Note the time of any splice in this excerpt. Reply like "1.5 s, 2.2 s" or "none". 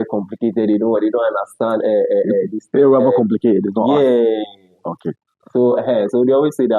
none

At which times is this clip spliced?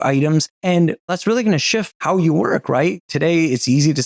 1.0 s, 1.9 s, 3.0 s

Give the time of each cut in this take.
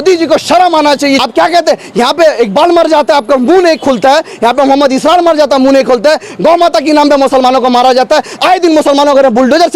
1.2 s

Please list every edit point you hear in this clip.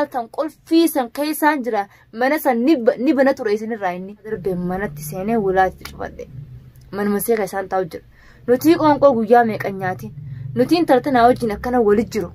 4.3 s

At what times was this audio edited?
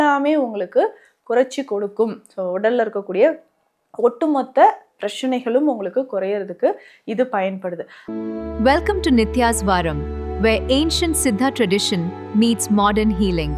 7.9 s

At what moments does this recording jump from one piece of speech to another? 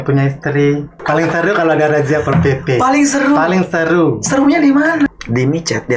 0.9 s, 5.1 s

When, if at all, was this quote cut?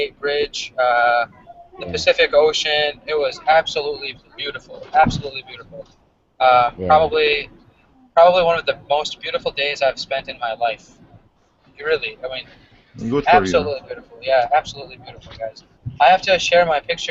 none

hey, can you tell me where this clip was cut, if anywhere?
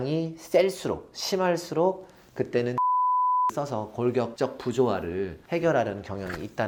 none

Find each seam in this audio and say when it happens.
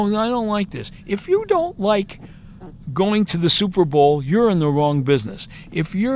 none

